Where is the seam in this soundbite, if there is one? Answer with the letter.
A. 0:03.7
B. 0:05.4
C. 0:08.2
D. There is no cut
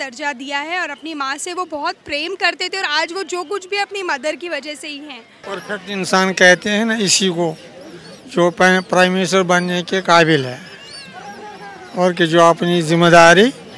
B